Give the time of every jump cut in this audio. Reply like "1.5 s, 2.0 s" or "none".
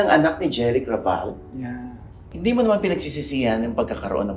2.2 s